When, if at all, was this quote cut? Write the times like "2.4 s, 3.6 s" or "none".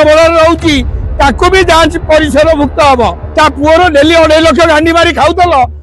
3.2 s